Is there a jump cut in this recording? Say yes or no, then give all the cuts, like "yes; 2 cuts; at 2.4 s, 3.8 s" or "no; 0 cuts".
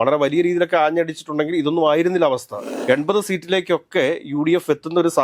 yes; 1 cut; at 2.7 s